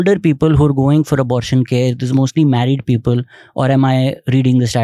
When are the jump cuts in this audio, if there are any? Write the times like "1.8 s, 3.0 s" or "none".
none